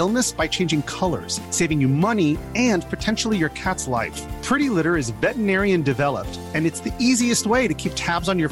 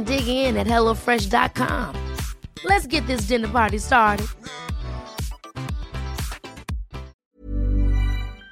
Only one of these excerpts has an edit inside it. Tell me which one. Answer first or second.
second